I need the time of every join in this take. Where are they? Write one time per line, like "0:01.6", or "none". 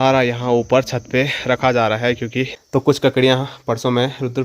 0:02.5